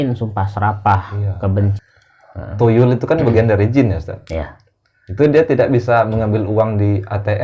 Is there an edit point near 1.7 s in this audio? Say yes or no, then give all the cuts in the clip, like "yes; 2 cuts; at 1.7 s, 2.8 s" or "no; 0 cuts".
yes; 1 cut; at 1.7 s